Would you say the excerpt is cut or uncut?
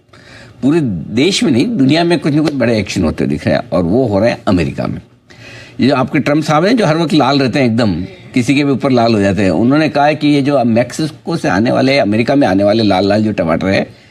uncut